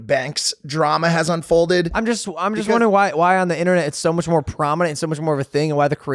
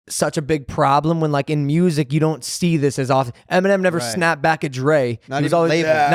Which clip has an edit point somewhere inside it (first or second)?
first